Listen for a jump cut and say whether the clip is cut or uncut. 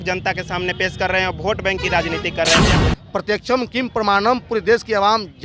cut